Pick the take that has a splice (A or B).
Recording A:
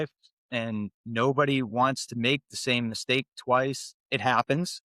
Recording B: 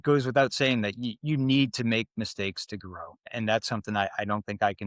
B